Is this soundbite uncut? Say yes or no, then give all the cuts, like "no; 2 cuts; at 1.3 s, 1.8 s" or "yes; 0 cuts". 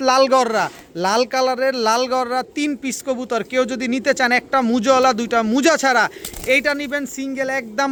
yes; 0 cuts